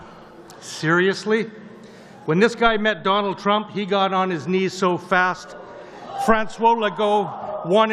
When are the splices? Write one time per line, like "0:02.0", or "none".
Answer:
none

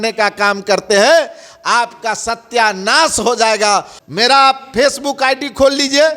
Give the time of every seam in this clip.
0:04.0

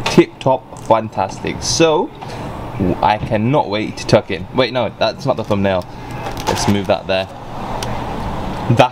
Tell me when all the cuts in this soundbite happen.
none

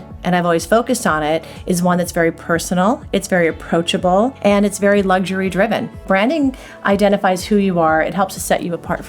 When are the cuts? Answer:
0:04.4
0:06.0

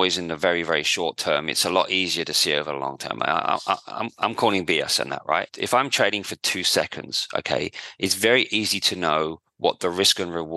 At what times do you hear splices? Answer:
0:05.5

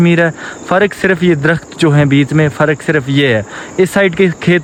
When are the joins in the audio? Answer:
none

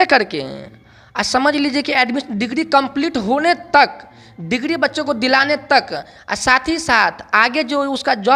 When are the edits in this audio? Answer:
none

